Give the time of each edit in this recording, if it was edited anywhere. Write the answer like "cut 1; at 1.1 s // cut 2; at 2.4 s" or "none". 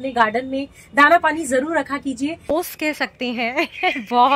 cut 1; at 2.6 s